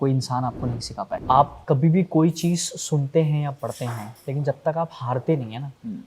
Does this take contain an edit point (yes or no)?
yes